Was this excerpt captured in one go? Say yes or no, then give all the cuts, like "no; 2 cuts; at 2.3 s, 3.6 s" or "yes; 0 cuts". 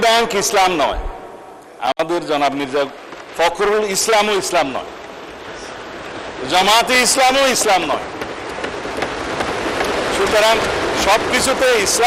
yes; 0 cuts